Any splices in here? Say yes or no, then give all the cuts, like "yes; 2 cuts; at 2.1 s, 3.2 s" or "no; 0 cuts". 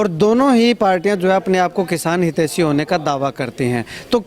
no; 0 cuts